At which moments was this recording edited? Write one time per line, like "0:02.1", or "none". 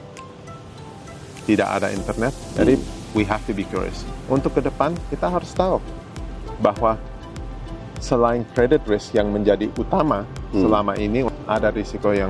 0:02.4
0:11.3